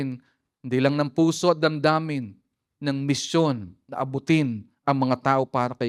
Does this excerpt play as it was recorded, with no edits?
yes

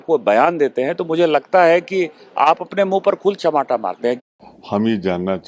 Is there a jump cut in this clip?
yes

